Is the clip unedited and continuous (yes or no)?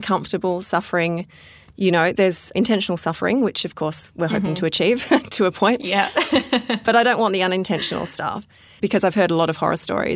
yes